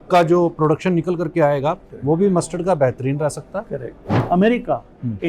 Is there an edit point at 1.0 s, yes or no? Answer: no